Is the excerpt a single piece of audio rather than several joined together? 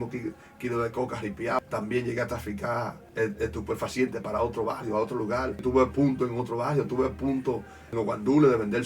no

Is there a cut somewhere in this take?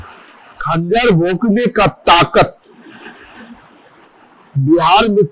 no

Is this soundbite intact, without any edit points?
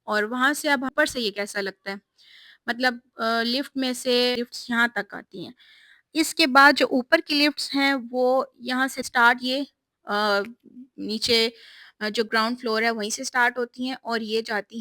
no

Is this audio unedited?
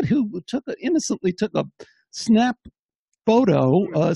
yes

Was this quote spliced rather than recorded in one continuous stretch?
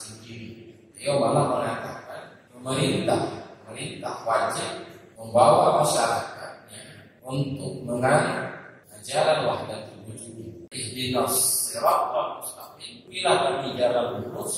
yes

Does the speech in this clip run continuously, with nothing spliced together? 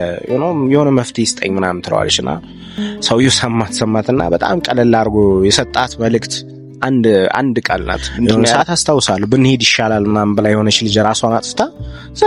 no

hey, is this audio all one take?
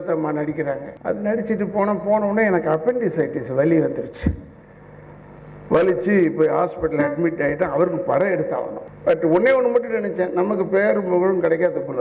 no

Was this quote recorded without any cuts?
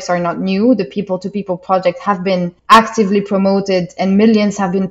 yes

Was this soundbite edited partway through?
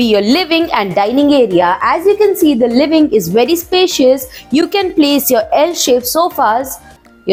no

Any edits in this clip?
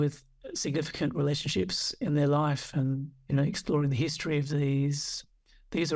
no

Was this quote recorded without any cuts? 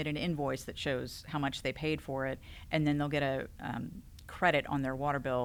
yes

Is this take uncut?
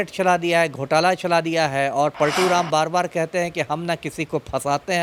yes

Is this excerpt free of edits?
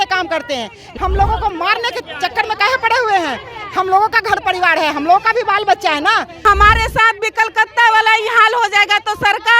no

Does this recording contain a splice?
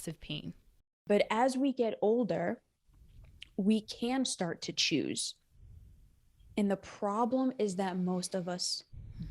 yes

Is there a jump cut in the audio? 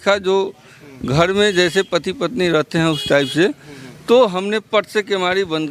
no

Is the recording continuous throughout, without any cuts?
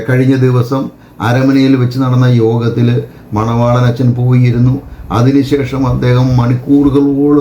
yes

